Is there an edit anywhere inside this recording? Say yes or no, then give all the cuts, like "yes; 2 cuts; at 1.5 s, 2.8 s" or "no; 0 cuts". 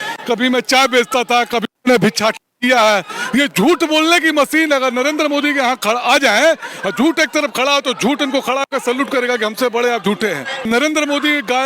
yes; 1 cut; at 10.7 s